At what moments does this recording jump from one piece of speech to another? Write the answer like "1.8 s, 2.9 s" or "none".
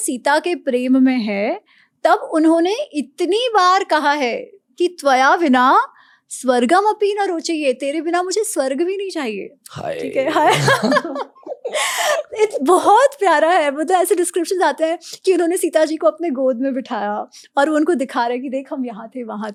none